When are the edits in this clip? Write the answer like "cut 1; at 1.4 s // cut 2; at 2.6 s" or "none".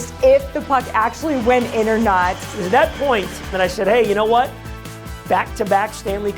cut 1; at 2.4 s // cut 2; at 3.5 s

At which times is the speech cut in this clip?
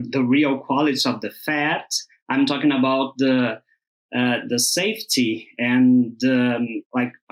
none

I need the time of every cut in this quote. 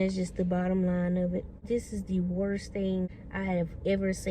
cut 1; at 1.5 s // cut 2; at 3.2 s

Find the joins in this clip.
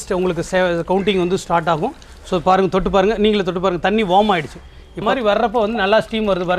cut 1; at 5.1 s

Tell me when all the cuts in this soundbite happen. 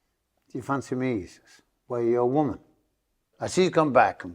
cut 1; at 3.3 s

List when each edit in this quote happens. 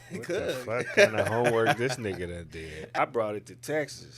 cut 1; at 2.9 s

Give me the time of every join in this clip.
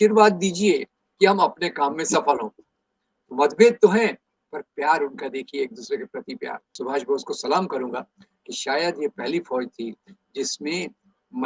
cut 1; at 6.8 s

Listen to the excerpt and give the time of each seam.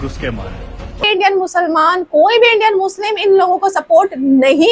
cut 1; at 1.0 s

